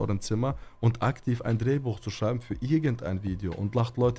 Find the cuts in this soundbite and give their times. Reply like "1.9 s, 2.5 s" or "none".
none